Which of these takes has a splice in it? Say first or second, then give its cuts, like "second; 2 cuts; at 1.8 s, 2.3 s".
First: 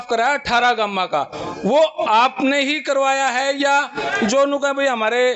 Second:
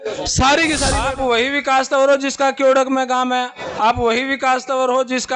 second; 1 cut; at 1.0 s